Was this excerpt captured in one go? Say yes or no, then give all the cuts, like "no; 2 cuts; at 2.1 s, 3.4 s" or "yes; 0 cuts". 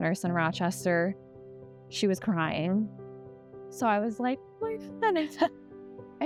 yes; 0 cuts